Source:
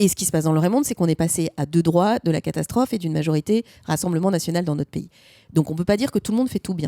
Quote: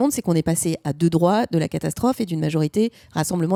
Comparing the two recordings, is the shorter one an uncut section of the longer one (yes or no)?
yes